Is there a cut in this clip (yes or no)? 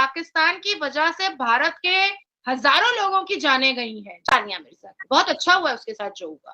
yes